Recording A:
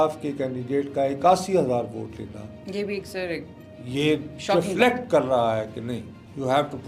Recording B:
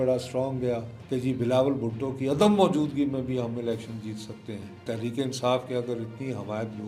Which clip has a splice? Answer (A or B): B